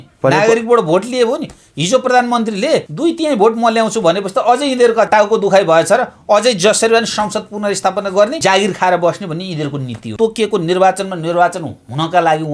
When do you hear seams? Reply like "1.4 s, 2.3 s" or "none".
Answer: 2.9 s, 5.1 s, 8.3 s, 10.1 s